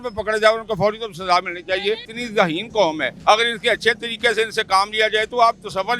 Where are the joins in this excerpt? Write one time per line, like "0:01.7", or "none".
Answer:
0:02.1
0:03.1